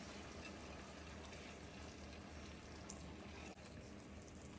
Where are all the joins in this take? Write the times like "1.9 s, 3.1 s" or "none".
3.5 s